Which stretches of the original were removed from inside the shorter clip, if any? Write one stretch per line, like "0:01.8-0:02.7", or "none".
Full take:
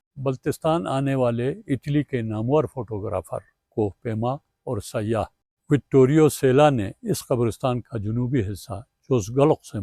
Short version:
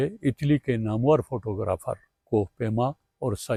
none